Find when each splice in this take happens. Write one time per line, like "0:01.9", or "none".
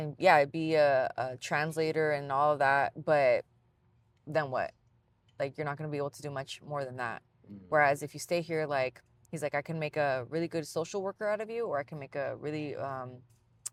none